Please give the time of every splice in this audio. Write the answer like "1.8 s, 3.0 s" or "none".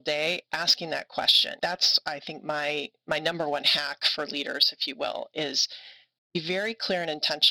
none

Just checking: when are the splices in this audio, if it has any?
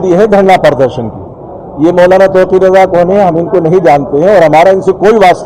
none

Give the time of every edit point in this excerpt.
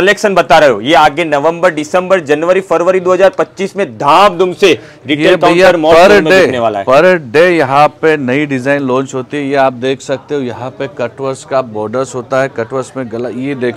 none

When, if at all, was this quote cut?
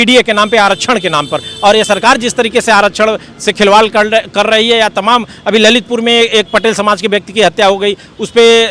none

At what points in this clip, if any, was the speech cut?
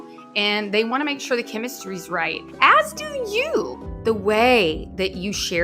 3.8 s

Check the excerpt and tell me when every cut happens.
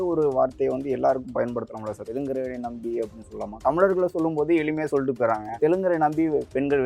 2.0 s, 3.6 s, 5.6 s

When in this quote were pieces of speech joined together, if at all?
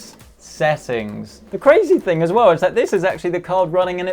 1.5 s

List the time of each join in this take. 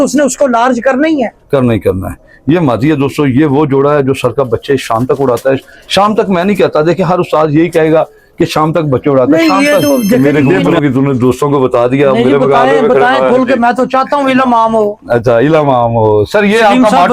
10.8 s

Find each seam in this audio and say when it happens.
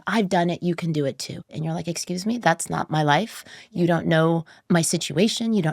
1.5 s

